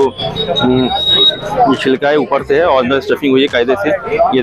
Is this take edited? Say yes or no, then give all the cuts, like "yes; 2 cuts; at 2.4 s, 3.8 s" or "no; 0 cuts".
no; 0 cuts